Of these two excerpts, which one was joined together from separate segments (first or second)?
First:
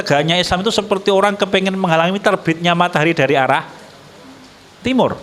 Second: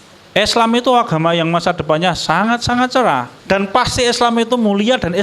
second